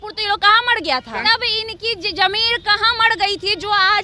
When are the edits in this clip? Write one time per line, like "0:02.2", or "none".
0:01.2